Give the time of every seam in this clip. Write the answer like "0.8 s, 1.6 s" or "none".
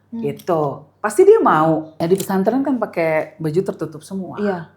1.9 s